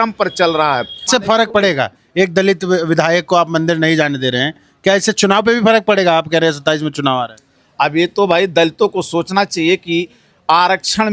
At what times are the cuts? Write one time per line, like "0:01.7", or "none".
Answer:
none